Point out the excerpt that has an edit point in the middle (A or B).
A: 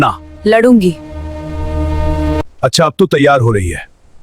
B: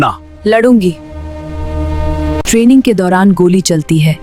A